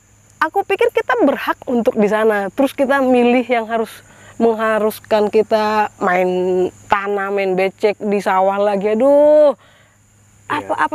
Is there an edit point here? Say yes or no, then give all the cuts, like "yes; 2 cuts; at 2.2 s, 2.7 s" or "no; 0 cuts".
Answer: no; 0 cuts